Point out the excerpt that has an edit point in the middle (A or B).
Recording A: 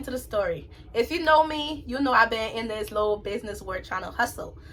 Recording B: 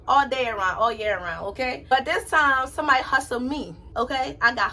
B